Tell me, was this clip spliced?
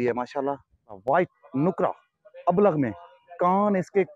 yes; 1 cut; at 1.0 s

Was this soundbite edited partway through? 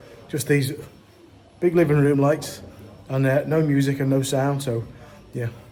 no; 0 cuts

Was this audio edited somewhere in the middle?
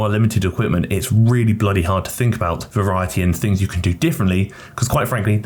no; 0 cuts

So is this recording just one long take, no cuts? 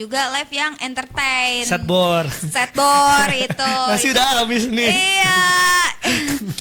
yes; 0 cuts

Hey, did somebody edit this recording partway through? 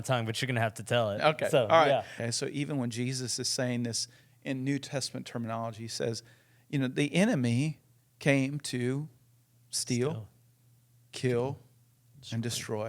yes; 1 cut; at 2.1 s

